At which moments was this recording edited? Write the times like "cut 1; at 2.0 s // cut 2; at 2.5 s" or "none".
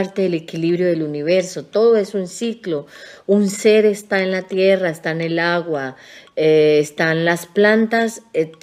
none